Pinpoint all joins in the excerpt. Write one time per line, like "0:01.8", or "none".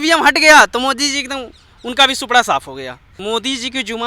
0:03.1

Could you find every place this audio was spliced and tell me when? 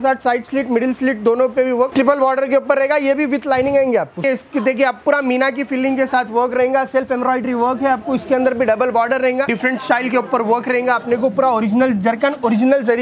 0:01.9
0:04.2
0:09.5

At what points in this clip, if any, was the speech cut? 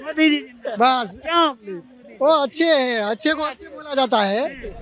none

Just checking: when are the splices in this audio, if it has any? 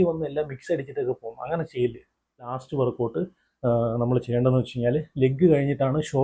0:02.6

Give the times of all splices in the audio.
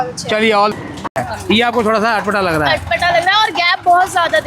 0:01.1

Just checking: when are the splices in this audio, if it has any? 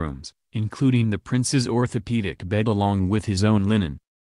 0:02.4

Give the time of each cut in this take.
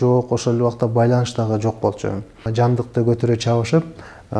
0:02.4

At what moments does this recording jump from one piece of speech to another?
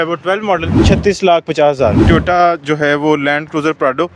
0:00.8
0:02.1

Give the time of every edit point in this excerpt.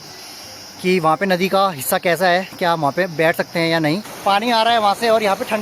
0:04.1

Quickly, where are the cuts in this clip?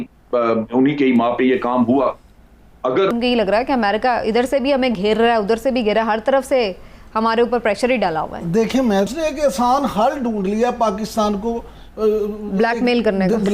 0:03.1
0:09.1

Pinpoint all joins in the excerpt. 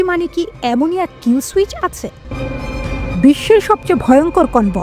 0:02.2

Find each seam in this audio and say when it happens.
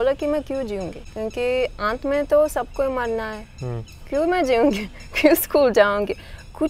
0:01.0

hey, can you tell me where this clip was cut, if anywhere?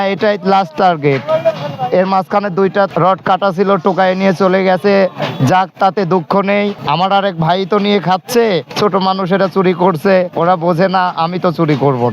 0:02.9
0:06.8
0:08.7
0:10.3

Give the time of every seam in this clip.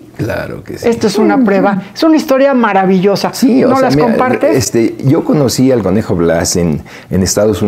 none

